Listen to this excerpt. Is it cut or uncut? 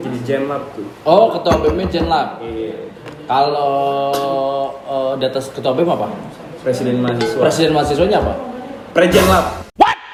uncut